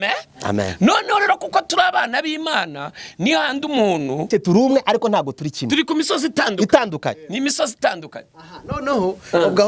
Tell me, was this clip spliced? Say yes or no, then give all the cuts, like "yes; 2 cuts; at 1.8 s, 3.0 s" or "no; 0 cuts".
yes; 1 cut; at 4.3 s